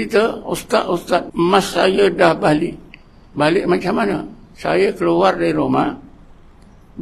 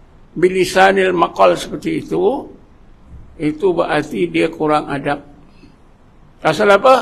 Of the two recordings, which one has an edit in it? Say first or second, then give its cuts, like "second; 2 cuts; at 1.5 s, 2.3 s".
first; 1 cut; at 1.3 s